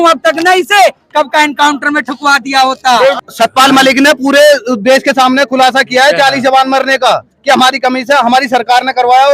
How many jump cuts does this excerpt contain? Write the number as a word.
one